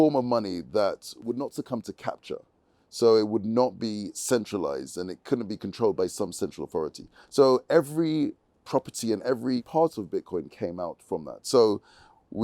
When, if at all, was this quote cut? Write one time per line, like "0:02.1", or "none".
0:01.1
0:09.7

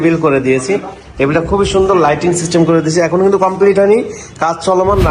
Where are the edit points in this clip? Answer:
none

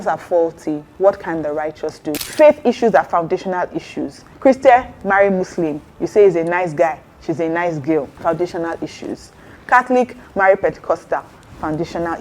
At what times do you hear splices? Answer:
0:00.9
0:02.2
0:04.2
0:08.1

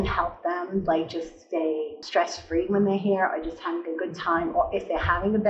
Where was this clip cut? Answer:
0:02.0

